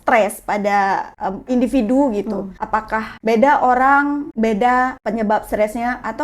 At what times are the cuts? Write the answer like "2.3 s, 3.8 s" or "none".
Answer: 1.5 s, 2.8 s, 4.3 s, 5.0 s